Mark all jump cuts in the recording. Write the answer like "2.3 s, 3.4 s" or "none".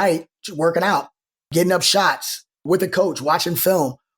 1.5 s, 2.6 s